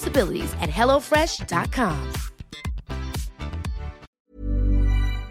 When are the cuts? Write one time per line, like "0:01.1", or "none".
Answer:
0:04.1